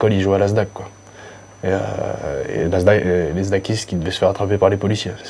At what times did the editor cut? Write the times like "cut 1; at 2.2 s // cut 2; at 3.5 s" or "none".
none